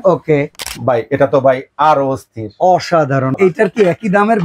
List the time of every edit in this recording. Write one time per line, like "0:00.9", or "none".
0:03.3